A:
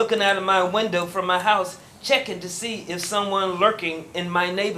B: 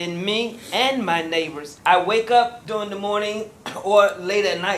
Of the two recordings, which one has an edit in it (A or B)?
B